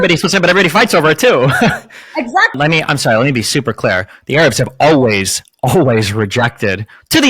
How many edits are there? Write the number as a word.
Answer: one